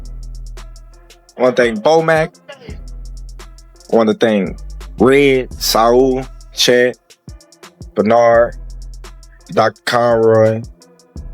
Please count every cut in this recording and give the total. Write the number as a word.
one